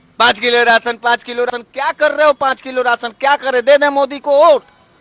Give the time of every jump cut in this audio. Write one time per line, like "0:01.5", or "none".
0:01.5

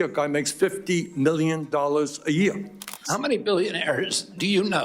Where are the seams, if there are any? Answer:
0:03.0

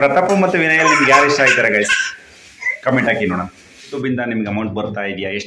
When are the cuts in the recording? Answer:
0:04.0

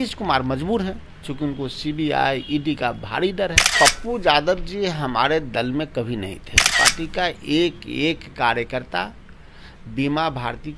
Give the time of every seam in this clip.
0:03.7
0:06.7

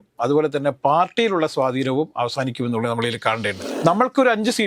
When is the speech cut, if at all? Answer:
0:03.6

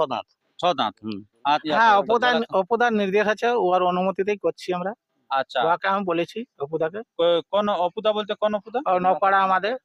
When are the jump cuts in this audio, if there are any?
0:01.3

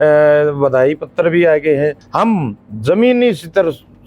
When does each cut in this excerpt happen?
0:02.0

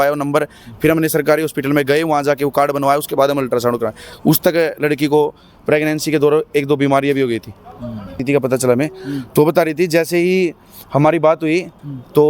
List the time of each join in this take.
0:08.2

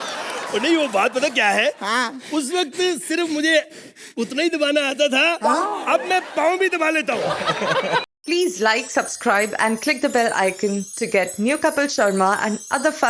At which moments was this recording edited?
0:08.0

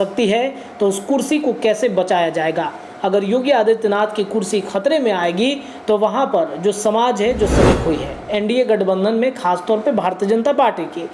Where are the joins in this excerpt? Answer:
0:07.8

